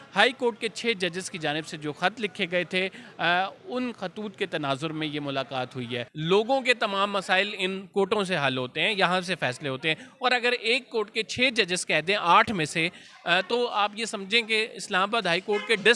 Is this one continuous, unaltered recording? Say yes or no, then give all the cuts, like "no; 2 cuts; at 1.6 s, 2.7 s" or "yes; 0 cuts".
no; 1 cut; at 6.1 s